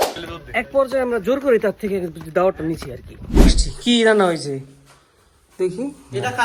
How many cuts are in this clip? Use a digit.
0